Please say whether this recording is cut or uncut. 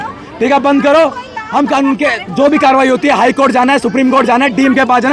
uncut